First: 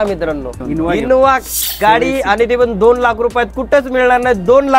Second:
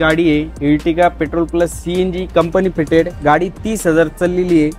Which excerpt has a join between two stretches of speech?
first; 1 cut; at 1.0 s

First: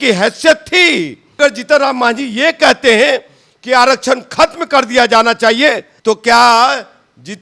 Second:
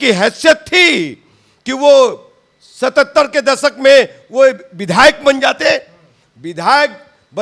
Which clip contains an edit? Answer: first; 2 cuts; at 1.4 s, 5.9 s

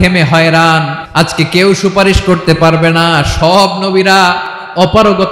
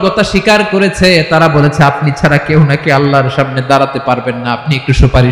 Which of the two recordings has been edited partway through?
first; 1 cut; at 1.0 s

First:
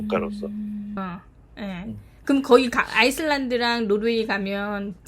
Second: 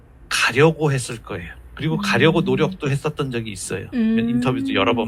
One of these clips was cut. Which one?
first; 1 cut; at 1.0 s

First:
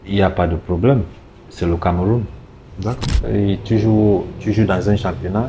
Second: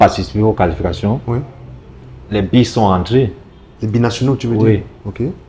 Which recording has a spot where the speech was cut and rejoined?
first; 1 cut; at 3.1 s

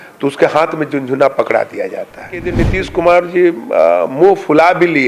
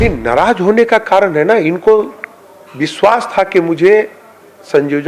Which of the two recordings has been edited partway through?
first; 1 cut; at 2.6 s

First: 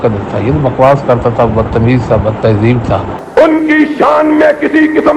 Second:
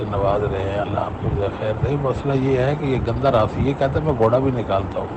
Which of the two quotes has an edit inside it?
first; 1 cut; at 3.2 s

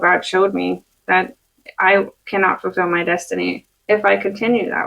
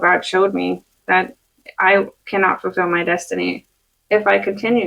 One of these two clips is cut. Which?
first; 1 cut; at 3.7 s

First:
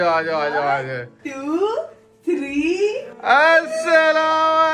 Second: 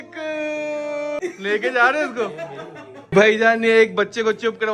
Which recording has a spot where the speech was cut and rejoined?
second; 2 cuts; at 1.2 s, 3.0 s

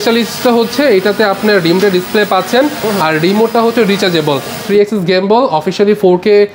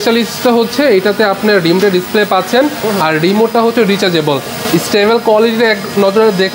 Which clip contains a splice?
first; 1 cut; at 4.6 s

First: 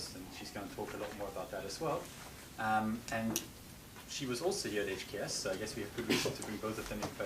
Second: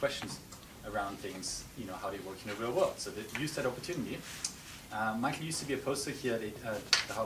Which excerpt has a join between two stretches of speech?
first; 1 cut; at 4.8 s

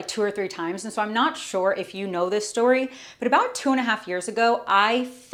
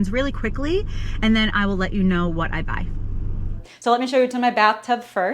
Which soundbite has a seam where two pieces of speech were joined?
second; 1 cut; at 3.8 s

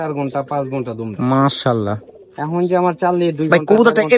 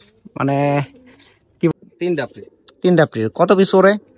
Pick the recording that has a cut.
second; 1 cut; at 1.7 s

